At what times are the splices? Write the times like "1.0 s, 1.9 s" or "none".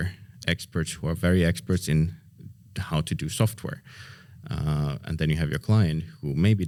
none